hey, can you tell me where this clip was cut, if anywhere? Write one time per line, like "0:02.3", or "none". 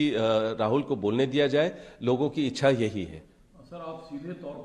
none